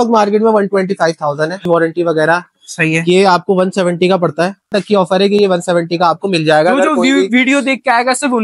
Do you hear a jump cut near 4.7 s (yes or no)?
yes